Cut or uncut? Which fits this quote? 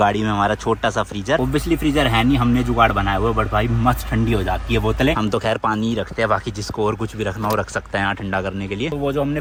uncut